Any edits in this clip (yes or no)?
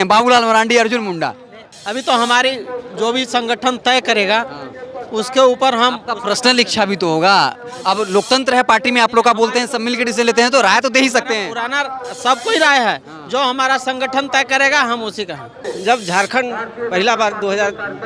yes